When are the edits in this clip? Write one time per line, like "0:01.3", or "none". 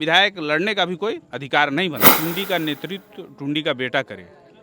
0:02.1

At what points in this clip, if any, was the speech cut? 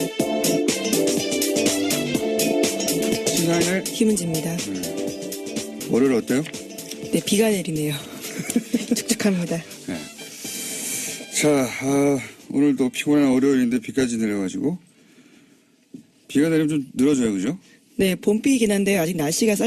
0:13.2

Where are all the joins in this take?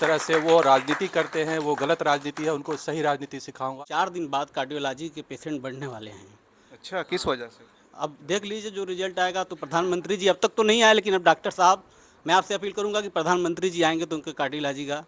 0:03.8

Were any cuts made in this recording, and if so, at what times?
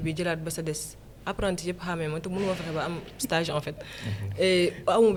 none

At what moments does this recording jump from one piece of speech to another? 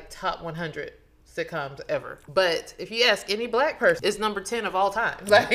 0:02.1
0:04.0

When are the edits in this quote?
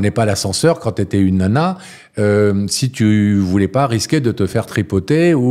none

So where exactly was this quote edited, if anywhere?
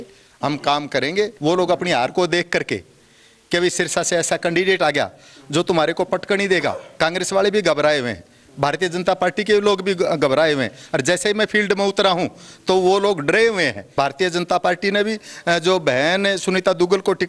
0:01.3
0:13.8

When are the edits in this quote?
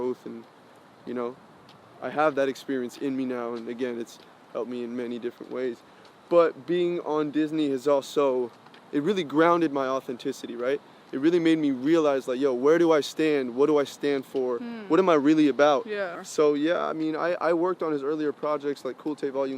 0:16.2

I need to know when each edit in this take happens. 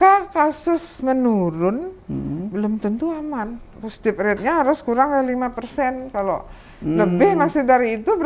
none

